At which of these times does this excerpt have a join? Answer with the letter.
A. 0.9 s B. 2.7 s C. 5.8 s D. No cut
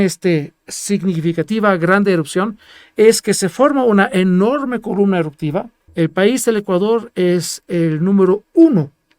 C